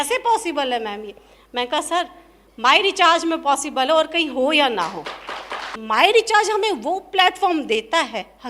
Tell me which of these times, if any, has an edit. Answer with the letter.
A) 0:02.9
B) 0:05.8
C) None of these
B